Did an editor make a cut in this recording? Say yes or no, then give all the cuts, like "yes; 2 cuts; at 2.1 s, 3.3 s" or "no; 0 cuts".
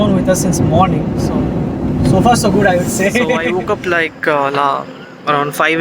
yes; 1 cut; at 3.4 s